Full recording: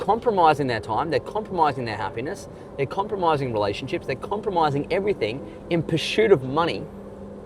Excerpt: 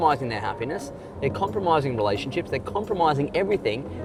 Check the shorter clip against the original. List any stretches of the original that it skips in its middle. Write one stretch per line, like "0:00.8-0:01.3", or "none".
none